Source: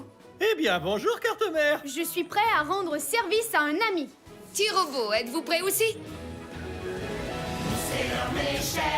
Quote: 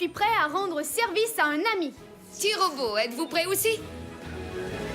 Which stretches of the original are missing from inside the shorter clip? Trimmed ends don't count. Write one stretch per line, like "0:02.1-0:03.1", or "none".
0:06.1-0:06.2